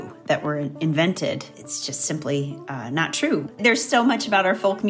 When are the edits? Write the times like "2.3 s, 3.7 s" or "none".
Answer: 1.5 s, 3.5 s